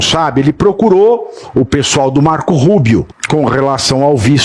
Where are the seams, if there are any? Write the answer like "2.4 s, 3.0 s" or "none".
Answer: 3.2 s